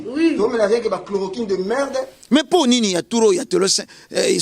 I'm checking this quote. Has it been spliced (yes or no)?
yes